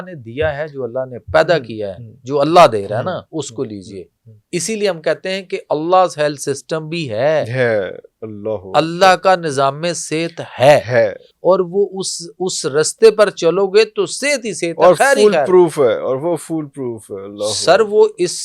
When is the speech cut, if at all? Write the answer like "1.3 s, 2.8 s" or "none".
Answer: none